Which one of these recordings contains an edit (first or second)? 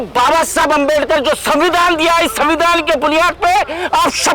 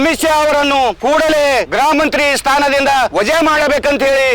second